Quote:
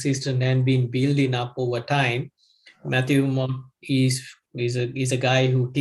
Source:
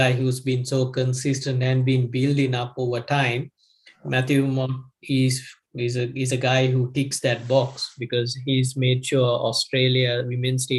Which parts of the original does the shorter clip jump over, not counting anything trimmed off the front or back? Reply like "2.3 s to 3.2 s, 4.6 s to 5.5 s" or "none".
none